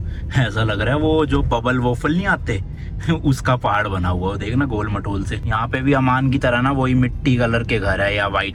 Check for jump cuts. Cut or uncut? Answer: uncut